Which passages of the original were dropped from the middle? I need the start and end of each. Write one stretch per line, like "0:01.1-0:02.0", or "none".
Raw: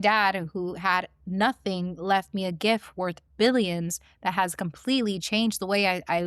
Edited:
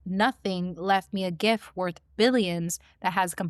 none